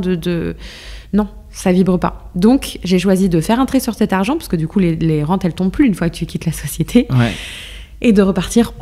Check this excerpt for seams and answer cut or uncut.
uncut